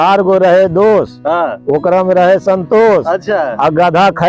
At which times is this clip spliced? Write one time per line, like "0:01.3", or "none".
none